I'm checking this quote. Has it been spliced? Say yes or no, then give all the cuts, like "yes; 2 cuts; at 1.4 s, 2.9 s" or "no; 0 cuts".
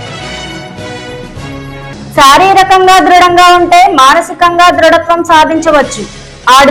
no; 0 cuts